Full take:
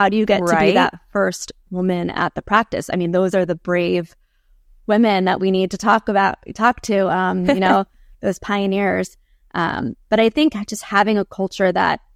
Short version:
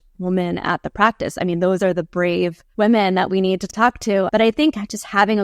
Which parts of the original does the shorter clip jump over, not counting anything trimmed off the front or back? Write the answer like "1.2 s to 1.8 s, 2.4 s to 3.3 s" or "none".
4.1 s to 4.7 s, 5.8 s to 9.4 s

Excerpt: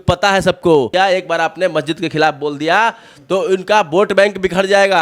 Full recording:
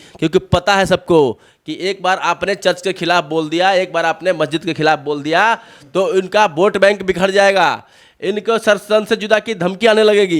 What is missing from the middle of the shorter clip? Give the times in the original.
1.4 s to 3.6 s

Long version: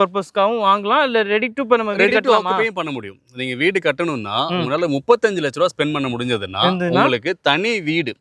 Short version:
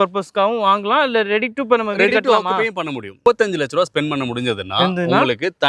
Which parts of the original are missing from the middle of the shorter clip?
3.2 s to 5.0 s

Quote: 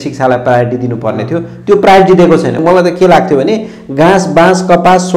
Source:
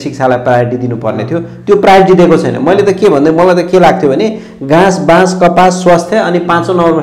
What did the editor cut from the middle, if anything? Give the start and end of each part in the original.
2.6 s to 3.3 s

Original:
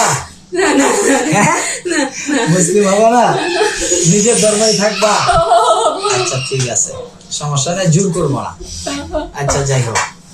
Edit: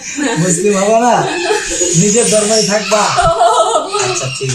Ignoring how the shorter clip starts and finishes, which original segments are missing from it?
none

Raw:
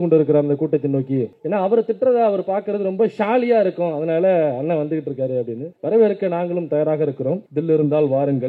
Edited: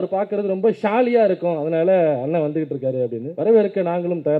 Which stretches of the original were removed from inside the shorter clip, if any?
5.6 s to 5.7 s

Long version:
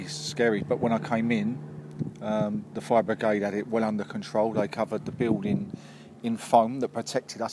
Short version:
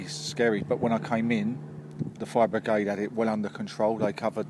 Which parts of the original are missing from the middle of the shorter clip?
2.2 s to 2.7 s

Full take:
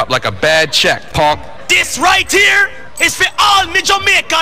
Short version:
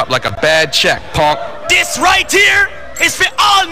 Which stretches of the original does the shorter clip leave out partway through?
none

